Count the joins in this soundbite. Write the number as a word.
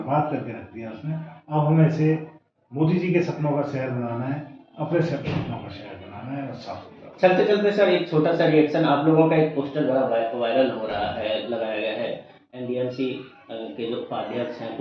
zero